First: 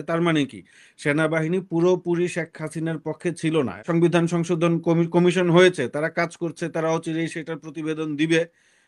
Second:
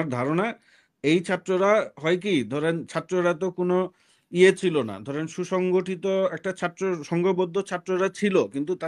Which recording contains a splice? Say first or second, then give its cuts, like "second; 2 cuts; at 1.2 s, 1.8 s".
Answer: first; 1 cut; at 3.8 s